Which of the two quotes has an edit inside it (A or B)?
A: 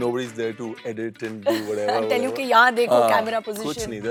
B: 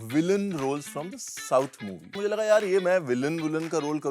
B